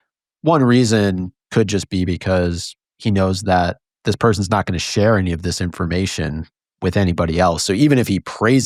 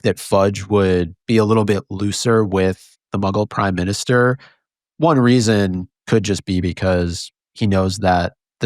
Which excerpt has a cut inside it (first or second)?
second